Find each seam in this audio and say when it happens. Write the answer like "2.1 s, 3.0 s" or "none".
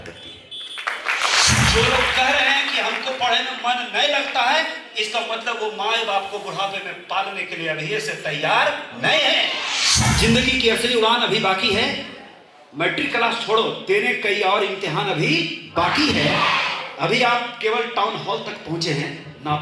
1.5 s, 10.0 s